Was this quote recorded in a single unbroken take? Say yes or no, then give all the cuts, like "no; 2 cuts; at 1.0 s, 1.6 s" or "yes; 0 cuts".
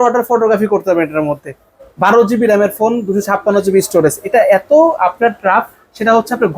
yes; 0 cuts